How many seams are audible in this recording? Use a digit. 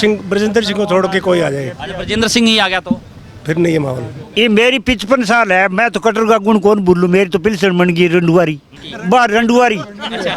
2